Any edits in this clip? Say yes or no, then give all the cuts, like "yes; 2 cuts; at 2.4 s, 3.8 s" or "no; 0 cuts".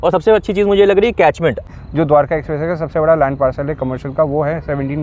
yes; 1 cut; at 1.6 s